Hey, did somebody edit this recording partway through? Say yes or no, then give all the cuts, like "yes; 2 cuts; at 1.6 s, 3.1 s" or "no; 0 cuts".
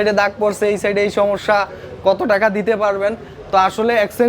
no; 0 cuts